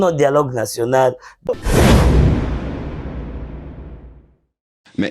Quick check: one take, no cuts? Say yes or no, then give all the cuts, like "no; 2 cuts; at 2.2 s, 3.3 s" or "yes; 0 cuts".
no; 1 cut; at 1.3 s